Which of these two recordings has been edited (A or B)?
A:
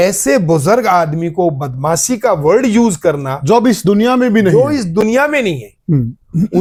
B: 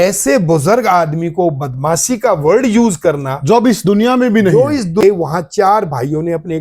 B